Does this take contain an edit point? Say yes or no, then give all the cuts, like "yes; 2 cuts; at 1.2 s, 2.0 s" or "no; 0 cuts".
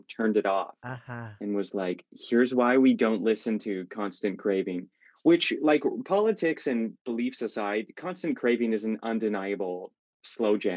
no; 0 cuts